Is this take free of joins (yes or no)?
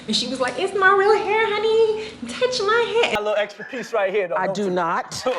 no